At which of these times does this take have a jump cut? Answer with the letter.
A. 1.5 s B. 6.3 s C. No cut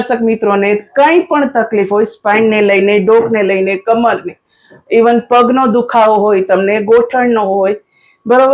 C